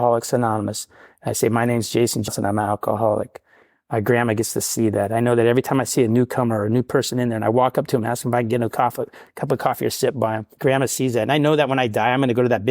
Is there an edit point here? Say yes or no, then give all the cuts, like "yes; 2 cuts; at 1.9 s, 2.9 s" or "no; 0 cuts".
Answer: yes; 2 cuts; at 2.3 s, 10.5 s